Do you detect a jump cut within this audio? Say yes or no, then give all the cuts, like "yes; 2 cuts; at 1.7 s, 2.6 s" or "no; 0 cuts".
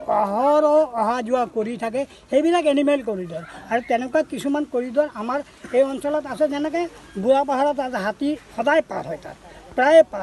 no; 0 cuts